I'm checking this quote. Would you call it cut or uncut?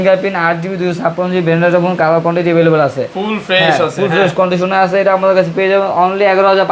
uncut